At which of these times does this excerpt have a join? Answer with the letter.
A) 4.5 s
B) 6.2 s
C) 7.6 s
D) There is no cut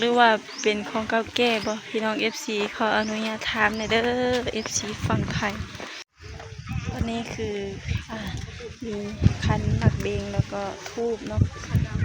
B